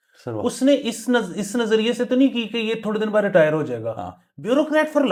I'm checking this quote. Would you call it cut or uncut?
uncut